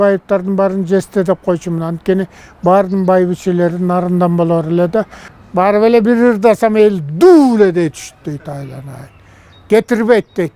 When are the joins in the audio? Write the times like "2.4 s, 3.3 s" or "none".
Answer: 5.2 s